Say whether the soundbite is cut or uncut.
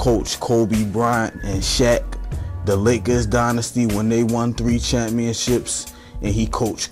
cut